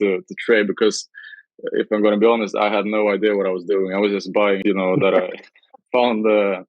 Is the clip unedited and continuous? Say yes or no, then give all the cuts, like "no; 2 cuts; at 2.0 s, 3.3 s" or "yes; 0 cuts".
no; 1 cut; at 4.6 s